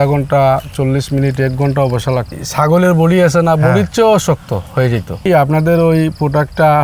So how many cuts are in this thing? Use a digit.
2